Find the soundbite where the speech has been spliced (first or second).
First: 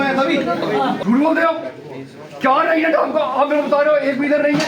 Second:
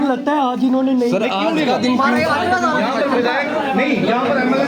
first